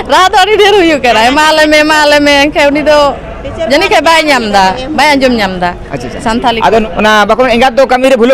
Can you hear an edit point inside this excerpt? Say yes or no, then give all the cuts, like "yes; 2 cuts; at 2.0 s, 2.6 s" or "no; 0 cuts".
yes; 1 cut; at 6.8 s